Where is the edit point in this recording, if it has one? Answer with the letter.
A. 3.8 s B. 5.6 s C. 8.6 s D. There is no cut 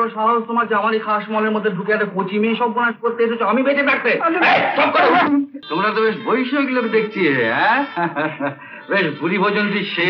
B